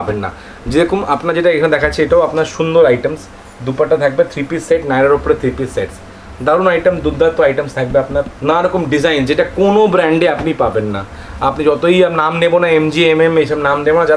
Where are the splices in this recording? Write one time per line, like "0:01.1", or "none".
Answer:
0:08.3